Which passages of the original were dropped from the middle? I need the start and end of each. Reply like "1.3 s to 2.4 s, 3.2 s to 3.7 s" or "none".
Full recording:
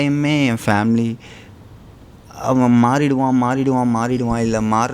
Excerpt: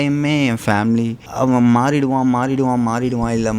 1.2 s to 2.3 s